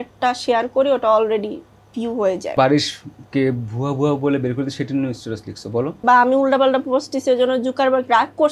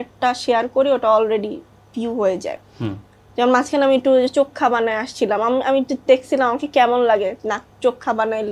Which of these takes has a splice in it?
first; 2 cuts; at 2.5 s, 6.0 s

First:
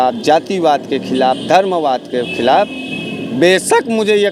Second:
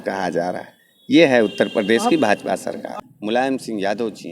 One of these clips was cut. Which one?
second; 1 cut; at 2.9 s

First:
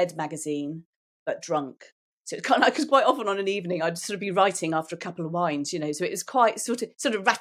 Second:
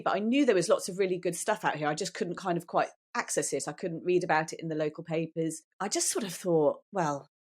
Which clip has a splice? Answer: second; 1 cut; at 5.7 s

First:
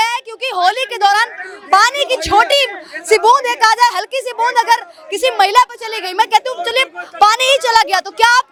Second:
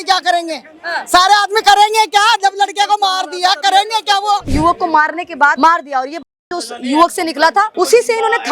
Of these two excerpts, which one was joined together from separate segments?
second; 3 cuts; at 4.5 s, 5.6 s, 7.7 s

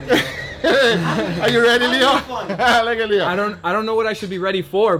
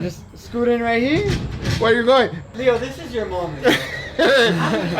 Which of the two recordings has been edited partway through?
second; 1 cut; at 2.4 s

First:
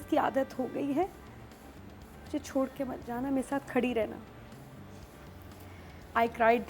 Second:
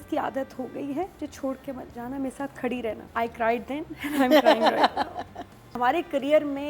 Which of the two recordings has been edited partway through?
second; 3 cuts; at 1.1 s, 3.0 s, 5.8 s

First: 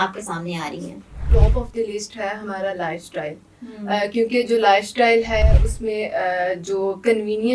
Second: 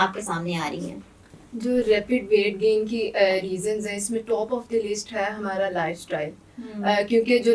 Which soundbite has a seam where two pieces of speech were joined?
first; 1 cut; at 1.3 s

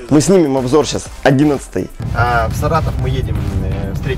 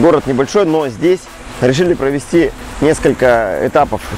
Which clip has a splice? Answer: first; 1 cut; at 2.0 s

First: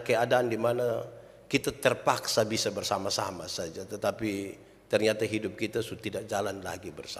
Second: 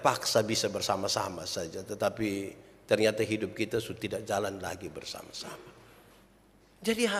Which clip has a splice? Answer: second; 1 cut; at 6.2 s

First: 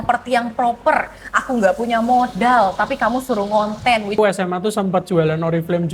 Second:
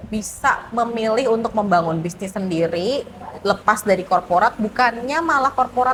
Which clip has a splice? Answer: first; 1 cut; at 4.2 s

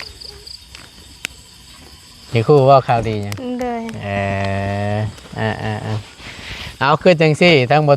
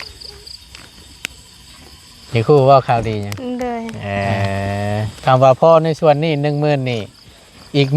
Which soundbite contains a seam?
second; 1 cut; at 5.1 s

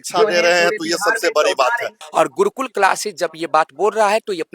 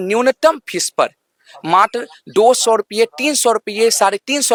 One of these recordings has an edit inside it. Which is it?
first; 1 cut; at 1.9 s

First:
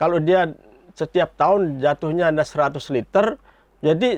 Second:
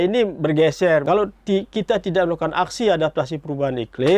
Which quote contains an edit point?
second; 1 cut; at 1.0 s

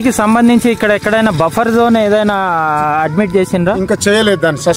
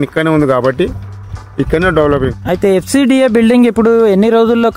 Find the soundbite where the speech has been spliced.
second; 1 cut; at 2.4 s

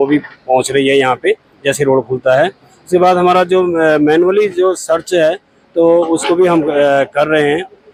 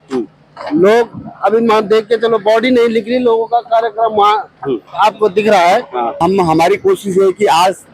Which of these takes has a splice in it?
second; 1 cut; at 6.2 s

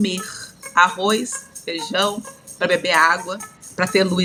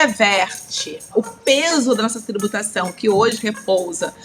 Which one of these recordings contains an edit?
second; 1 cut; at 1.1 s

